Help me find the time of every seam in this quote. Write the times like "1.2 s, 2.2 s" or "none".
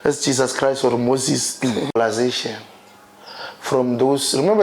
2.0 s